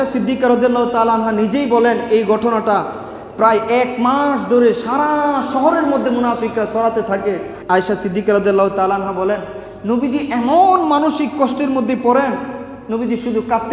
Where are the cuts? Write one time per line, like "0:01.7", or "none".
0:07.5